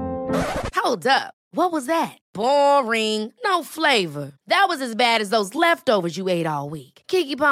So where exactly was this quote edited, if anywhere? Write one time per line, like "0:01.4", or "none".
none